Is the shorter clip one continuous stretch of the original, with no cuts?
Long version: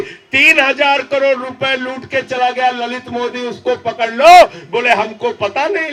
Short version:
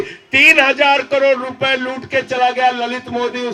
yes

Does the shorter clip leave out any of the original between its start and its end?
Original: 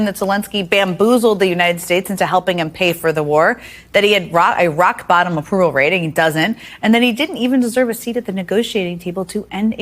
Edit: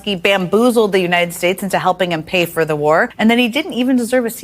yes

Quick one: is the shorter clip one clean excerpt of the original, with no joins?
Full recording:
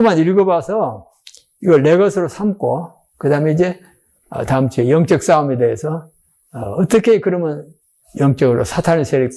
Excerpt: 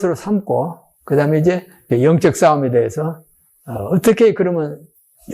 no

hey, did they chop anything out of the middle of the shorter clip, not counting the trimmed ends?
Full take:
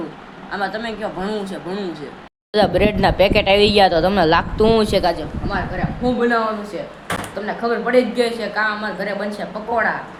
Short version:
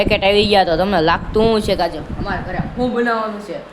no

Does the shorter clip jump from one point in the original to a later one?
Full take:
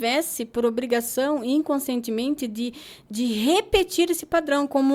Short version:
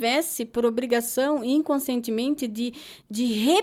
no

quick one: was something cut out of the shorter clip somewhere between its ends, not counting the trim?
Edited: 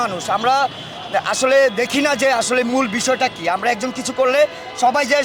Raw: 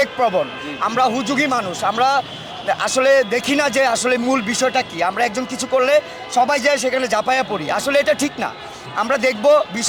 no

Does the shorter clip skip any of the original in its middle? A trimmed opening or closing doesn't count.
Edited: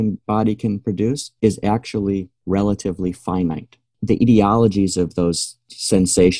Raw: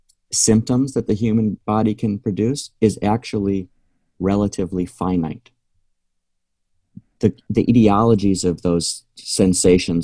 yes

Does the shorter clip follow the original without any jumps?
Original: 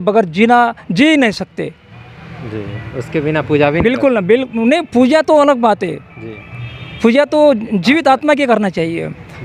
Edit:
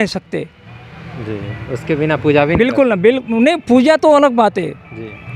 yes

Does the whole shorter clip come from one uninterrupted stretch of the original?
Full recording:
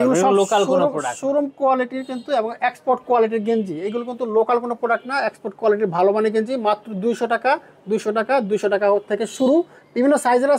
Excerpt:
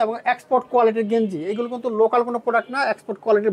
yes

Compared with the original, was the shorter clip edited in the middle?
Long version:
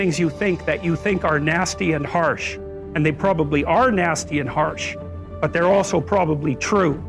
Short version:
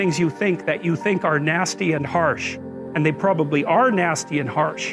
no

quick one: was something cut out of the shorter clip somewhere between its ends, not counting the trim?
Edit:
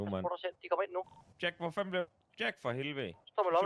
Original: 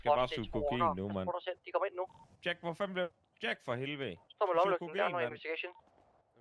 no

